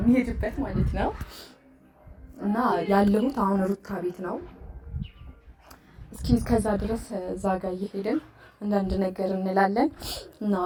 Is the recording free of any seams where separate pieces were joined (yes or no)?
yes